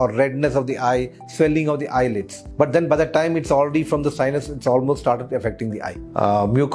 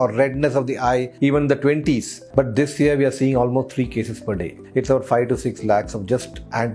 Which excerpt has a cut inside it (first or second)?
second